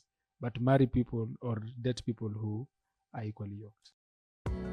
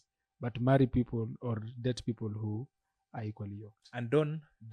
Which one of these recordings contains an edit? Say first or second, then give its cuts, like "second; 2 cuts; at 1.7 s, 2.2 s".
first; 1 cut; at 3.8 s